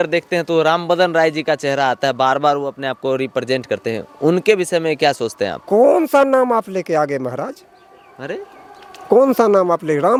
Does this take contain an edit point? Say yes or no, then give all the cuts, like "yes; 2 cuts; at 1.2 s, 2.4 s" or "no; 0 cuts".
no; 0 cuts